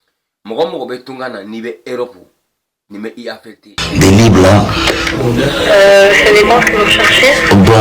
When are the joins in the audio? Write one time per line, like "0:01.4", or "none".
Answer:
0:03.8